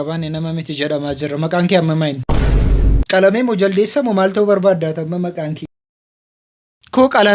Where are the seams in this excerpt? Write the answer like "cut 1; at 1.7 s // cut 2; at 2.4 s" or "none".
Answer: none